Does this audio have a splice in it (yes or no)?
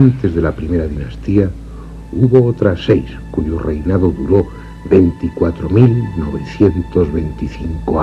yes